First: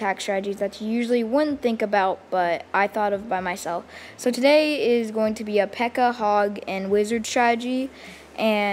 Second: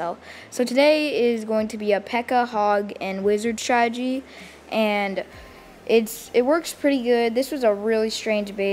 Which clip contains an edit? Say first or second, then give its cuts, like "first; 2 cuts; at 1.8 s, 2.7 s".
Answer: second; 1 cut; at 6.4 s